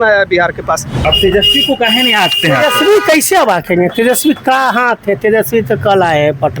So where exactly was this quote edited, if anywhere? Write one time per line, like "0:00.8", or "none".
0:00.9